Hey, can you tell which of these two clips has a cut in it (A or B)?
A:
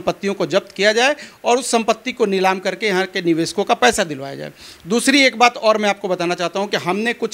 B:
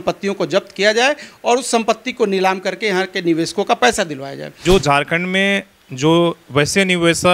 B